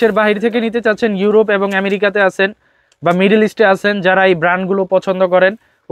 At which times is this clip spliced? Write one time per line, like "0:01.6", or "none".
none